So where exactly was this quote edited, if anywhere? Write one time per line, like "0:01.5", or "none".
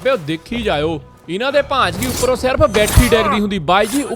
none